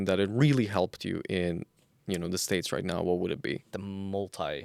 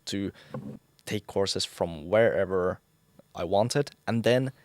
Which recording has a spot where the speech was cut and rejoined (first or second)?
second